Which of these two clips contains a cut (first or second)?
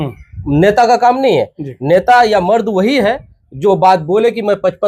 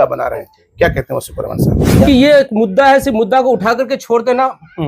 second